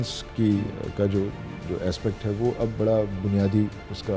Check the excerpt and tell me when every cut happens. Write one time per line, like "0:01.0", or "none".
none